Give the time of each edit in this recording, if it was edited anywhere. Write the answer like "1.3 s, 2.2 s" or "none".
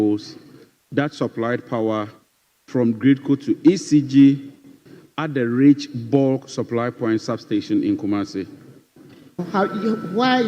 9.5 s

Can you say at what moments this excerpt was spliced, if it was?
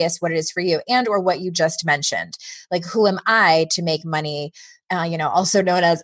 4.8 s

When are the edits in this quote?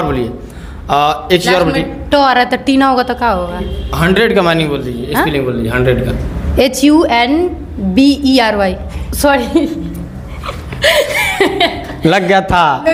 none

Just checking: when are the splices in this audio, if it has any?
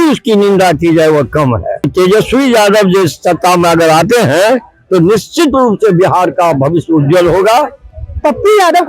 1.9 s, 7.8 s

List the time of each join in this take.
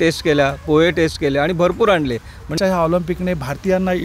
2.5 s

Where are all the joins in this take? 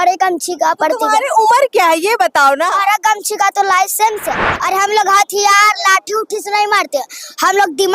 4.4 s

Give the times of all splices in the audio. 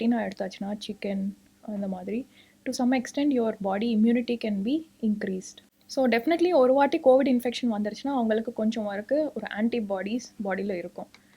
5.6 s

